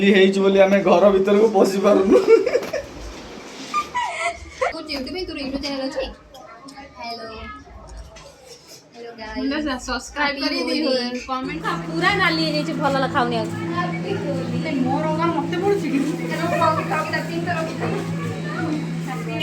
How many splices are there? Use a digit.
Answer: 2